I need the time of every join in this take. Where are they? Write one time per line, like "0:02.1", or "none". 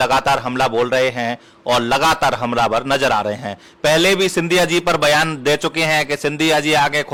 none